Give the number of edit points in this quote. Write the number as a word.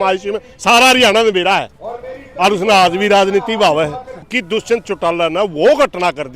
one